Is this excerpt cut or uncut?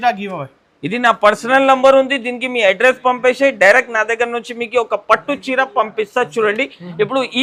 uncut